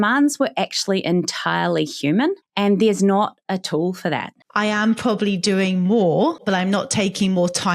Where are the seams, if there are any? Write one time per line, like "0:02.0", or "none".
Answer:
0:02.5
0:04.4
0:06.4